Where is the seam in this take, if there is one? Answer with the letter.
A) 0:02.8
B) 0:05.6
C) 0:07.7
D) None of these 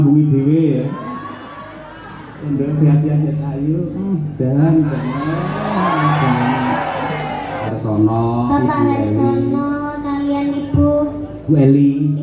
C